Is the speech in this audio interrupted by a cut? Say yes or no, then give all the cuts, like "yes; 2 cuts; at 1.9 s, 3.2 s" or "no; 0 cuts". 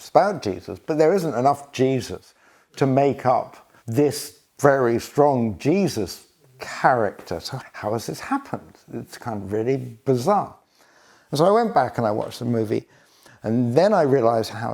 no; 0 cuts